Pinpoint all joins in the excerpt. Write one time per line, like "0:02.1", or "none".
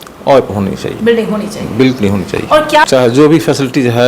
0:02.8